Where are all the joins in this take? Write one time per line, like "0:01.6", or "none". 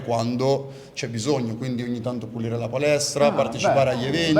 none